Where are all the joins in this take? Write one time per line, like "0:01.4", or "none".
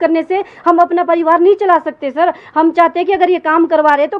none